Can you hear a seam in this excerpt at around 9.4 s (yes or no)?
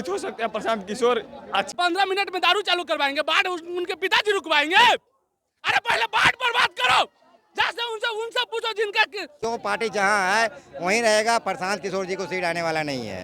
yes